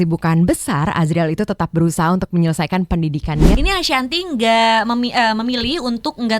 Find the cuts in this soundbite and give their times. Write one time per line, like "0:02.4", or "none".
0:03.5